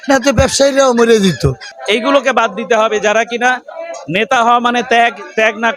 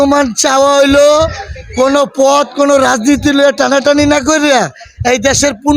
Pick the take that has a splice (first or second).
first